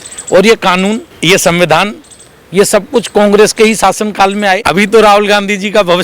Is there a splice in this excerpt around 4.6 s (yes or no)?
yes